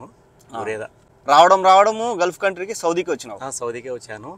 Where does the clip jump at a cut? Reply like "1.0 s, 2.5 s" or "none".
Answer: 1.1 s